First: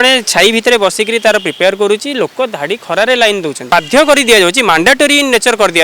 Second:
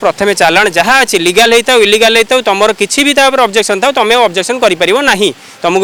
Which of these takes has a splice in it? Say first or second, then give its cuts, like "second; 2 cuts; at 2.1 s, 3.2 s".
first; 1 cut; at 3.6 s